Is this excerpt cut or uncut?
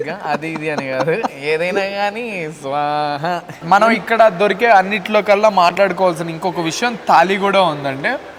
cut